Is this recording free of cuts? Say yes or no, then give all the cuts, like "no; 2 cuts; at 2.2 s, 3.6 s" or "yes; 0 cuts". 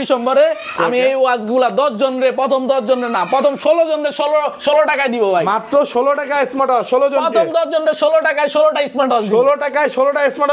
yes; 0 cuts